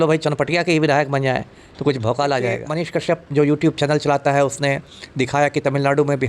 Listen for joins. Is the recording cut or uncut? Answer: cut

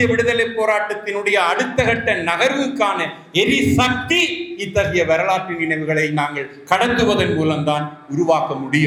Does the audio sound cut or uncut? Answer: uncut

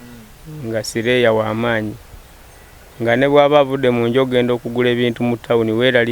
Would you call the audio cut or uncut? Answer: uncut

